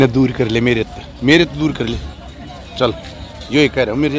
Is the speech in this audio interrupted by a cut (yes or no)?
no